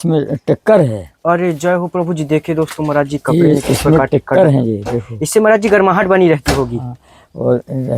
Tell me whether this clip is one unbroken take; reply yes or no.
yes